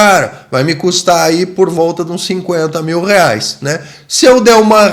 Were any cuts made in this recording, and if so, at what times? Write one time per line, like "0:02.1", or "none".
none